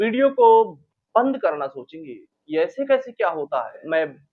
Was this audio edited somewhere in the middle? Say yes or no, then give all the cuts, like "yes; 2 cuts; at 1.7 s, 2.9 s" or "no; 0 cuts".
no; 0 cuts